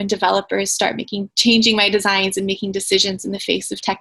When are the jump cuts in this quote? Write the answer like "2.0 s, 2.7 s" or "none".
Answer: 1.2 s